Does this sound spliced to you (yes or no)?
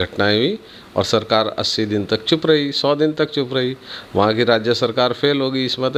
no